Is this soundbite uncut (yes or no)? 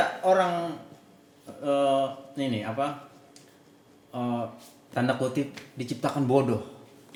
yes